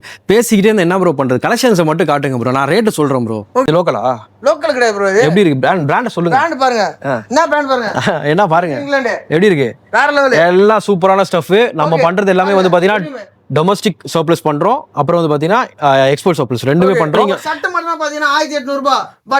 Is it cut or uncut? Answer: cut